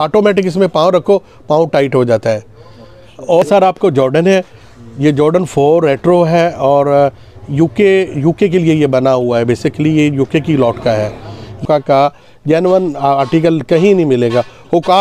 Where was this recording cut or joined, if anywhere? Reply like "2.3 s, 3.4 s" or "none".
3.4 s, 11.6 s